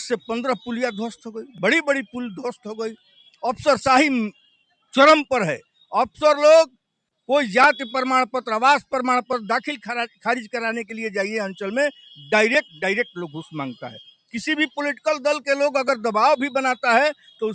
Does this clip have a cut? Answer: no; 0 cuts

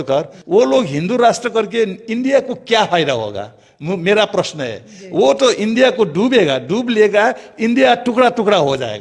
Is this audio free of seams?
yes; 0 cuts

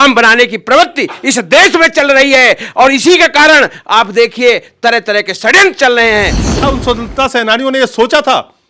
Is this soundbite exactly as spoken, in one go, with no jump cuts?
no; 1 cut; at 6.6 s

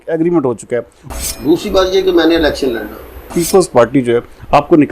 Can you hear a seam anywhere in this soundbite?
yes; 2 cuts; at 1.0 s, 3.3 s

